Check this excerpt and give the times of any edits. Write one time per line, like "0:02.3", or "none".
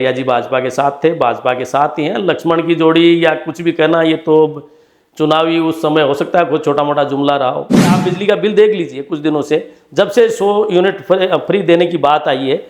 0:08.0